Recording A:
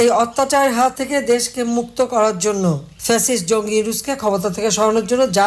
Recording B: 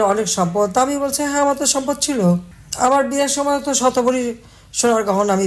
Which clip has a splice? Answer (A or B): A